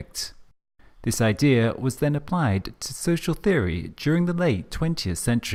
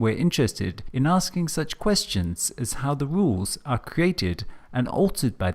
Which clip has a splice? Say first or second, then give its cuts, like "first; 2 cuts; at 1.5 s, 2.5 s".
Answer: second; 1 cut; at 2.2 s